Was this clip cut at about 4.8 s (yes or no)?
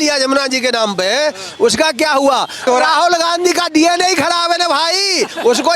no